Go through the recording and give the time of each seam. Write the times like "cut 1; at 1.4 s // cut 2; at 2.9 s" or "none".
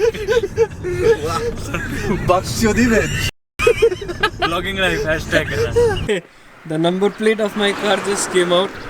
cut 1; at 5.8 s